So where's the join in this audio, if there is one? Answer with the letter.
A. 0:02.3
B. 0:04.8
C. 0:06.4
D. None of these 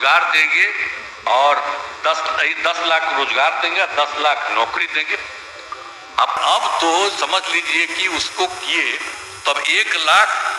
C